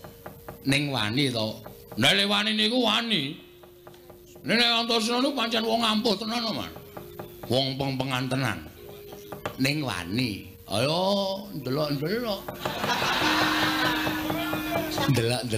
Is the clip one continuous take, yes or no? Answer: no